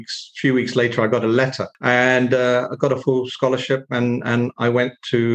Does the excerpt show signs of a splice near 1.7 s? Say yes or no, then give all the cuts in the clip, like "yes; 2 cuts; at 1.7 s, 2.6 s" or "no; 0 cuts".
yes; 1 cut; at 1.7 s